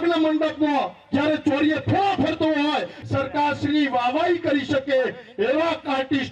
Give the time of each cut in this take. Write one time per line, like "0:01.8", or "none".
0:02.9